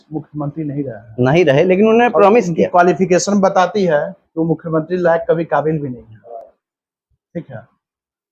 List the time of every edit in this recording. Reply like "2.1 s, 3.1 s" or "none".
none